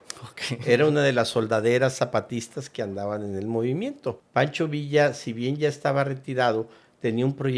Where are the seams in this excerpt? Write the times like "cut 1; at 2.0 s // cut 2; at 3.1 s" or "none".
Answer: cut 1; at 4.2 s